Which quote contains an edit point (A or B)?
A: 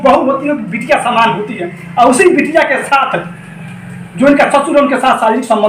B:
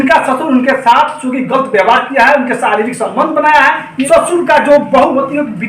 B